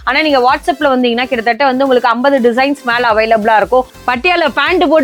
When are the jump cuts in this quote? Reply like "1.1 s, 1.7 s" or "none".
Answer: 3.9 s

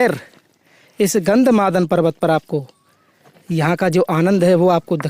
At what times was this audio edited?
none

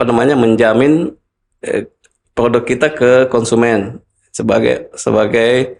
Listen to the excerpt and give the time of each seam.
none

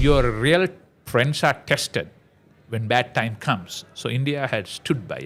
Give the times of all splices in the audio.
none

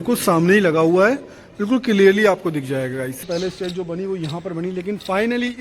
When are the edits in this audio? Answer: 3.3 s

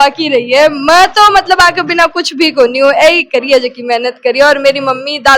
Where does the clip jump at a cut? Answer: none

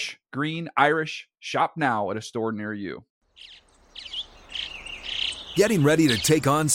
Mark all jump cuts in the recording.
3.0 s

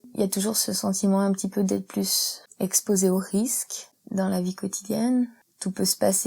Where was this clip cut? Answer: none

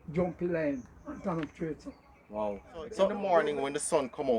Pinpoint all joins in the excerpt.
3.2 s

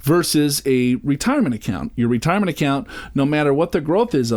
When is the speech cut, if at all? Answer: none

